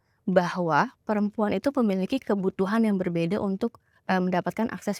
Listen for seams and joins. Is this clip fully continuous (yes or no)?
yes